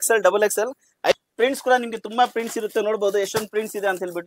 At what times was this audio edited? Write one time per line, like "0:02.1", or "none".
0:01.1